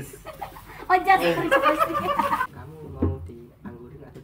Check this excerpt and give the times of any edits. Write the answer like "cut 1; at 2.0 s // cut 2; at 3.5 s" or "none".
cut 1; at 2.4 s